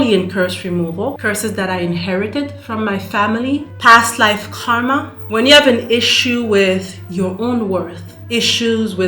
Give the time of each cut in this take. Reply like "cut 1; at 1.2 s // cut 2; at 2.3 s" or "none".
cut 1; at 1.2 s // cut 2; at 5.2 s